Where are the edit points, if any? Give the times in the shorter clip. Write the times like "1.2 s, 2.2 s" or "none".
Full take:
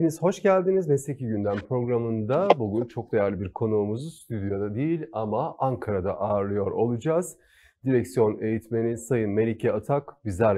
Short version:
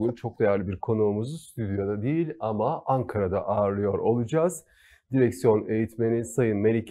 none